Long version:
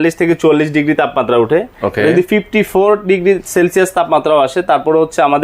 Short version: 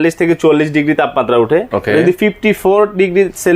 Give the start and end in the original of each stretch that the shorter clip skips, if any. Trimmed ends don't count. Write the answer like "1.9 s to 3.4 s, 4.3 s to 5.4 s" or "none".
1.7 s to 1.8 s